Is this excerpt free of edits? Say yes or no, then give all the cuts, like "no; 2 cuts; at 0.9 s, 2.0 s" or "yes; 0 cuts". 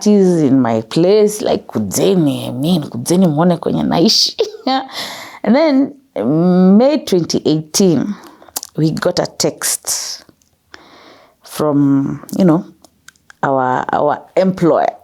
yes; 0 cuts